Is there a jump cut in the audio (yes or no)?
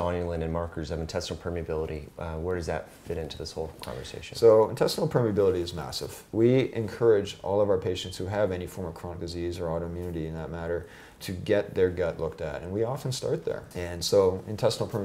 yes